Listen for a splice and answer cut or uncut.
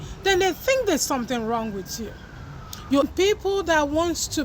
cut